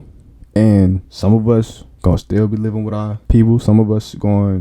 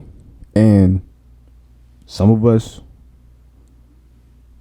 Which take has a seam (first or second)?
first